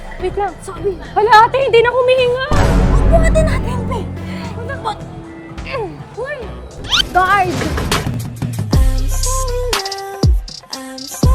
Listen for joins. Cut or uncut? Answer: cut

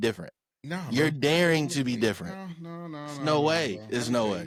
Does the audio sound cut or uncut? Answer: uncut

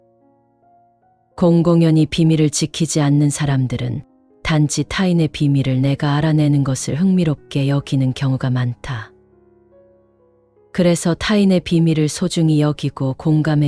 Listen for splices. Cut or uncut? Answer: cut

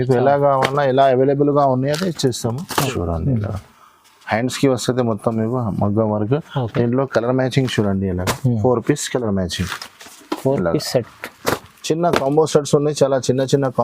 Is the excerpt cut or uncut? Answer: cut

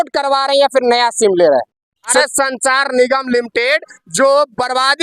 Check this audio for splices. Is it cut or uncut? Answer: cut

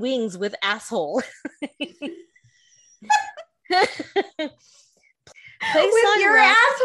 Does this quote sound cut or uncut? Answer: cut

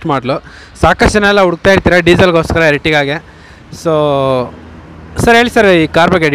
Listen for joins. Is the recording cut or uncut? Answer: uncut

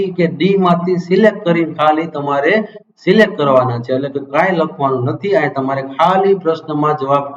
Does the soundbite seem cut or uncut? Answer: uncut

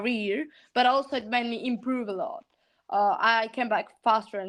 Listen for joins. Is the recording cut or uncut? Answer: uncut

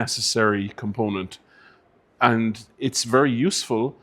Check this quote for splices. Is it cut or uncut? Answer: uncut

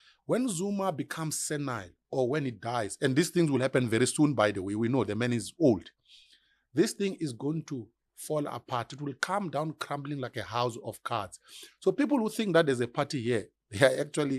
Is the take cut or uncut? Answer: uncut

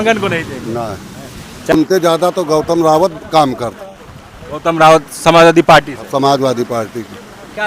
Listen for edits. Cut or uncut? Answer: cut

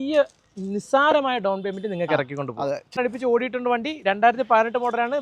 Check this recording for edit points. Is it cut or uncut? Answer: cut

